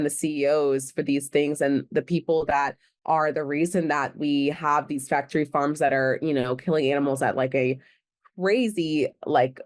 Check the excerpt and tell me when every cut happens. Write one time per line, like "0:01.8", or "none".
none